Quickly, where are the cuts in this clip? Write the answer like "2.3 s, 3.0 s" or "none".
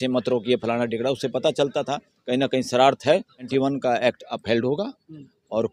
3.5 s